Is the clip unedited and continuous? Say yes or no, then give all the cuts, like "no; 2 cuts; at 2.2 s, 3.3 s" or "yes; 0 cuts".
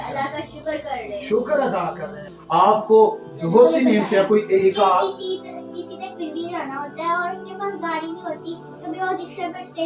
no; 1 cut; at 2.3 s